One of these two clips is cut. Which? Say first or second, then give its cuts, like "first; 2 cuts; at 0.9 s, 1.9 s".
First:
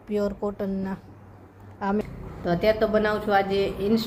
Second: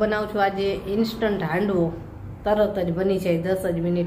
first; 1 cut; at 2.0 s